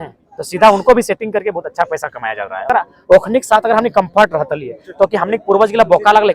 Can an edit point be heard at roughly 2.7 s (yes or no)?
yes